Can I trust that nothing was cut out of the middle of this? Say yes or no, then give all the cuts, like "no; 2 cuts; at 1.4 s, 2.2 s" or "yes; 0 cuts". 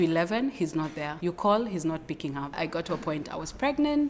no; 2 cuts; at 1.1 s, 2.6 s